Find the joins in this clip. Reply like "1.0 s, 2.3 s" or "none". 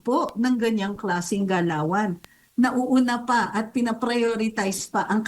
2.4 s